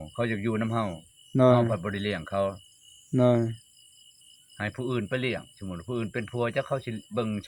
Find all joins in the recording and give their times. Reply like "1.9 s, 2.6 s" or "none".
none